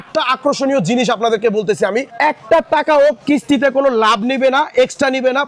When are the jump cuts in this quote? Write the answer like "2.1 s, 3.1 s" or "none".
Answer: 2.1 s